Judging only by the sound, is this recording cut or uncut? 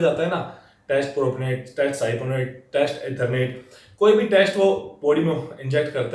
uncut